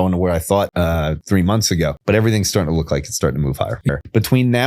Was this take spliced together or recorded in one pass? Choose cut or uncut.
cut